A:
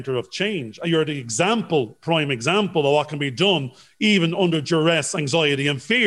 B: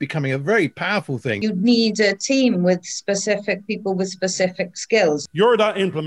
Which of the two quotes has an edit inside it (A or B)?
B